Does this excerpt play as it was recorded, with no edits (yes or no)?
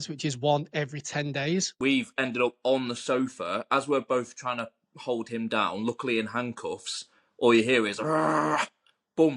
no